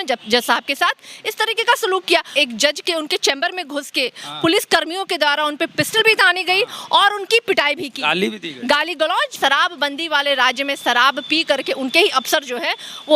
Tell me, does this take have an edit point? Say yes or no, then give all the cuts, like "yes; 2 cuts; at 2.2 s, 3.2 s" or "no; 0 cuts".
yes; 2 cuts; at 2.3 s, 9.3 s